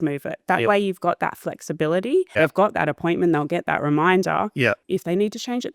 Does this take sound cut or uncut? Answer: cut